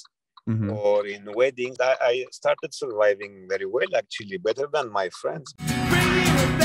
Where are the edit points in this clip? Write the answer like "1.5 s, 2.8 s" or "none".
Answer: 1.8 s, 5.5 s